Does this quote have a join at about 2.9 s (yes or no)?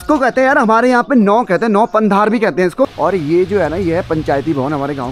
yes